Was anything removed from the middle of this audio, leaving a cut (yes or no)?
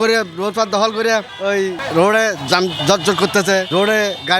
yes